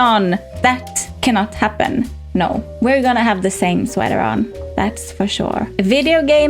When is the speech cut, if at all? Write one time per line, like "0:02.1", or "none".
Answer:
0:02.2
0:05.7